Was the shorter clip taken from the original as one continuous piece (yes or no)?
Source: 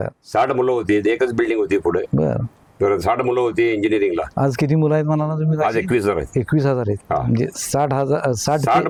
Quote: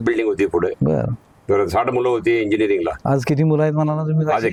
yes